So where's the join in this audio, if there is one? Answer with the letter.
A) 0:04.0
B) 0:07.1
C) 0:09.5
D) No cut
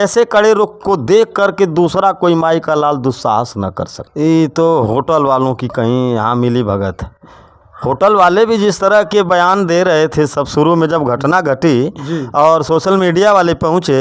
A